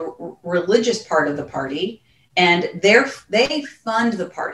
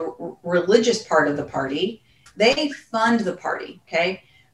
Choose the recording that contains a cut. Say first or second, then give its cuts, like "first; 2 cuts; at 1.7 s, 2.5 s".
second; 1 cut; at 2.2 s